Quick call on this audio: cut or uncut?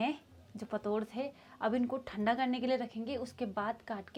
uncut